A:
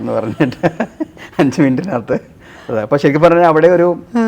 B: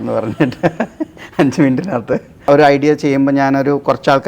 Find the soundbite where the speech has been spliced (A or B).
B